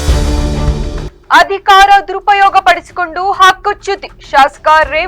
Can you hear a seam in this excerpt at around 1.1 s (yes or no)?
yes